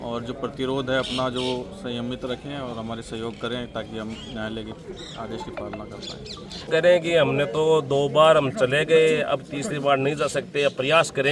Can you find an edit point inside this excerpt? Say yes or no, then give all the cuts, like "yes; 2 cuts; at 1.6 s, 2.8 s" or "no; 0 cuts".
yes; 1 cut; at 6.7 s